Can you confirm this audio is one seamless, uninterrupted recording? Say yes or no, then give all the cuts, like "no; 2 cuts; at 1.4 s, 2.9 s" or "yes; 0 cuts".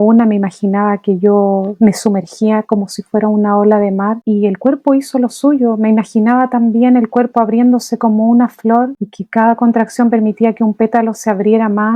yes; 0 cuts